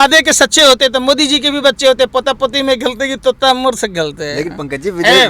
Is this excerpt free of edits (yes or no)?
yes